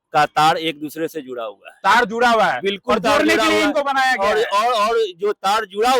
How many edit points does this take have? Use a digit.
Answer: 0